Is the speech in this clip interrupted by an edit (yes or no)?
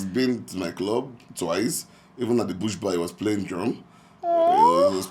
no